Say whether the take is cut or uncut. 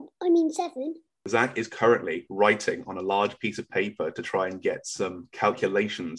cut